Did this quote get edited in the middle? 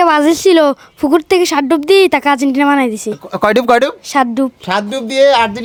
no; 0 cuts

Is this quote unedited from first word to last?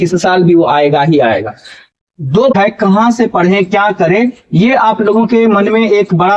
no; 1 cut; at 2.5 s

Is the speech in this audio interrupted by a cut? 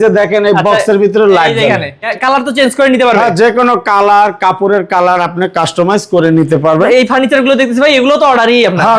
yes; 2 cuts; at 2.1 s, 6.8 s

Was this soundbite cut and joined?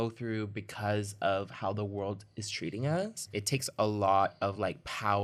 no; 0 cuts

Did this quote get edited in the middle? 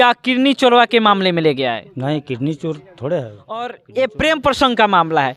yes; 1 cut; at 3.8 s

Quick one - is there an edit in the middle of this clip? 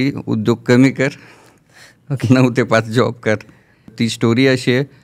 yes; 1 cut; at 3.9 s

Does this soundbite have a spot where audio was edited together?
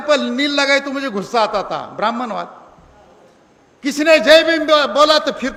no; 0 cuts

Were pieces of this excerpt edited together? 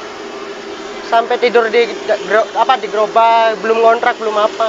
no; 0 cuts

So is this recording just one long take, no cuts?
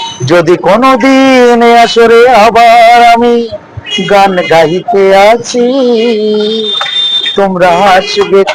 yes; 0 cuts

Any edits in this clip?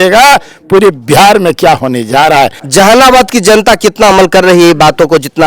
yes; 1 cut; at 2.6 s

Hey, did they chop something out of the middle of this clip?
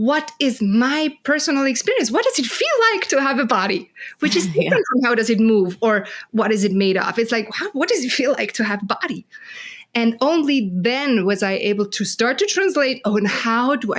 no; 0 cuts

